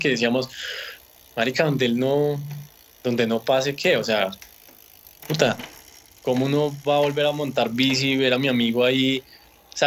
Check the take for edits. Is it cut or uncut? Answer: uncut